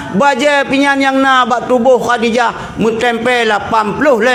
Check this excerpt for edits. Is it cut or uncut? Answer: uncut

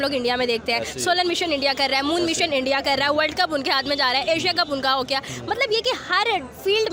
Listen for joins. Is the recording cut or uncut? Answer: uncut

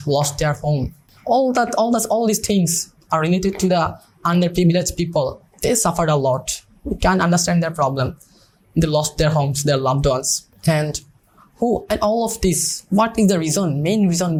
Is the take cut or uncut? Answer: uncut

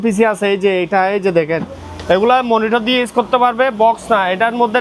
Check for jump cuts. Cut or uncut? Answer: uncut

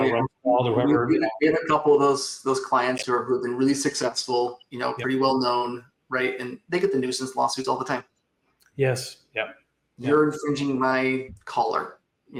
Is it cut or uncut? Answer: uncut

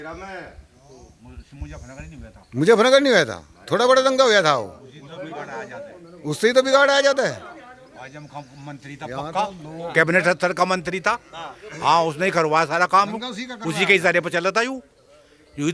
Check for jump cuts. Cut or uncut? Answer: uncut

